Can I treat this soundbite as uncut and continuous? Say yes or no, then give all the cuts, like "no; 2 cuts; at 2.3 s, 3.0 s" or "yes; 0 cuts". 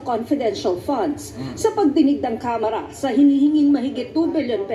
no; 1 cut; at 3.2 s